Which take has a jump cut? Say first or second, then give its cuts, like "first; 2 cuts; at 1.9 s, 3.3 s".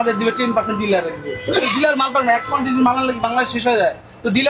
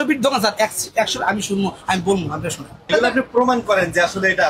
second; 1 cut; at 2.8 s